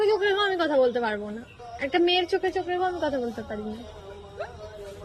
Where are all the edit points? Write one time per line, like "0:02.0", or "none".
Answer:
none